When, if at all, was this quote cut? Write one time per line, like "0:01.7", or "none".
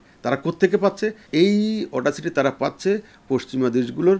0:01.2